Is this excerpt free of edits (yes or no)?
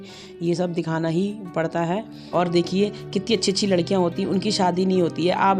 no